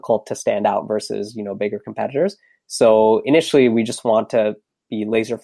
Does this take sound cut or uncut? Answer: uncut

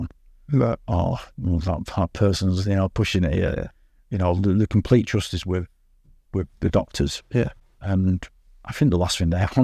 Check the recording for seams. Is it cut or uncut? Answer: uncut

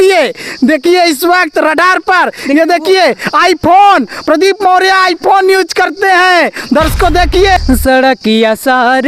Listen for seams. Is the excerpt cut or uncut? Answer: cut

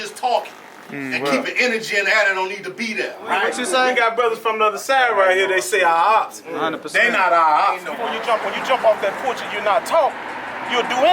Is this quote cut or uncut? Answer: cut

